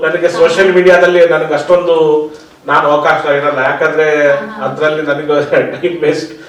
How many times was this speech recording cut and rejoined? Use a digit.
0